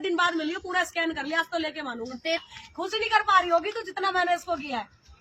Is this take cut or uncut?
cut